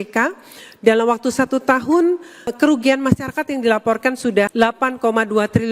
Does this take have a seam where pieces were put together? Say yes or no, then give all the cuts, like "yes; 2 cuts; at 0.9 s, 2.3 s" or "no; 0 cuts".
yes; 2 cuts; at 2.5 s, 4.5 s